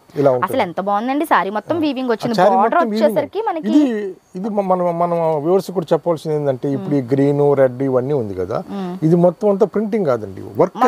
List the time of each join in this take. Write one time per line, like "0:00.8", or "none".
none